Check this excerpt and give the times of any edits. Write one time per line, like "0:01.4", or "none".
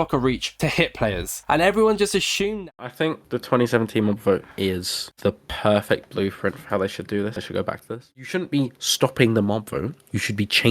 0:02.6
0:08.1